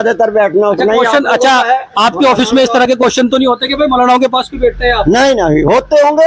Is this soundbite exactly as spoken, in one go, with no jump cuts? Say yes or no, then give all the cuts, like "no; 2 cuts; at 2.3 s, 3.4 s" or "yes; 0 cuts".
yes; 0 cuts